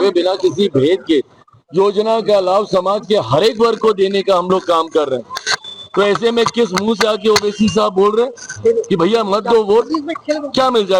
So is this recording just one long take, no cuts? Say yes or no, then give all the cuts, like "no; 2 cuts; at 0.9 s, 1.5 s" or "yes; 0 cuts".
yes; 0 cuts